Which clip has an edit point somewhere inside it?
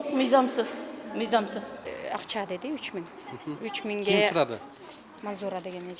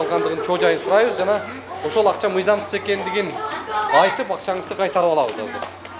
first; 1 cut; at 1.9 s

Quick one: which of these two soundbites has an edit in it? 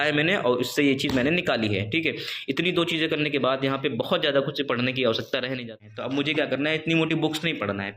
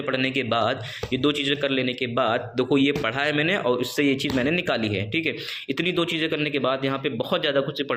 first; 1 cut; at 5.7 s

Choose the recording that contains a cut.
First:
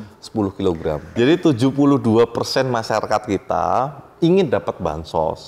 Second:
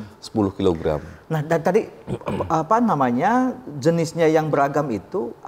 first; 1 cut; at 1.1 s

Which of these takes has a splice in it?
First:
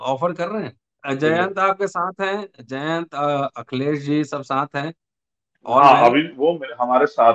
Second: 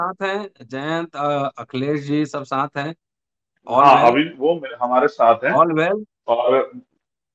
first; 1 cut; at 1.0 s

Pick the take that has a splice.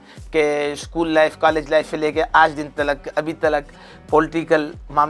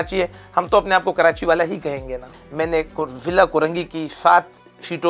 second; 1 cut; at 2.4 s

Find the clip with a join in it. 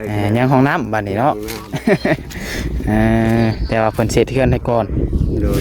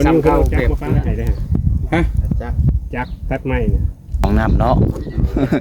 second; 1 cut; at 4.2 s

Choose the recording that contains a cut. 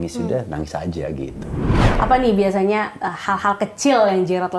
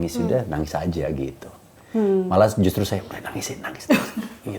first; 1 cut; at 1.8 s

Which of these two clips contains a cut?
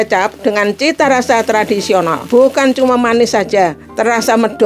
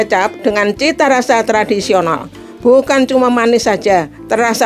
first; 1 cut; at 2.2 s

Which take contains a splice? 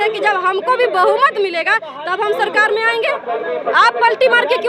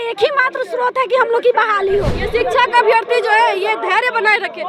second; 1 cut; at 2.2 s

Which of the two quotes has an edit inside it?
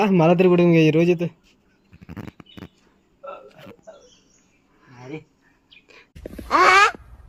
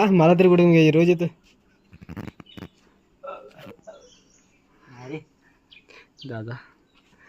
second; 1 cut; at 6.2 s

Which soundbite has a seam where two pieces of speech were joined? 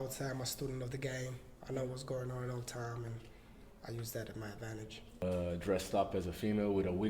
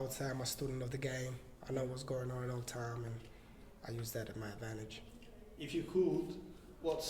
first; 1 cut; at 5.2 s

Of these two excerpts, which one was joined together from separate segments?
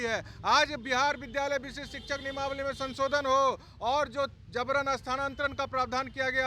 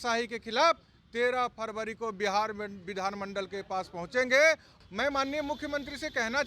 second; 1 cut; at 4.7 s

